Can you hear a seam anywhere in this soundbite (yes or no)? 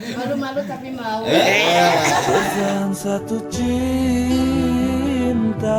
no